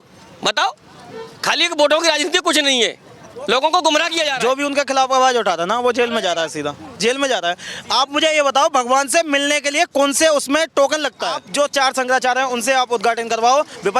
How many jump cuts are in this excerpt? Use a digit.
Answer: 2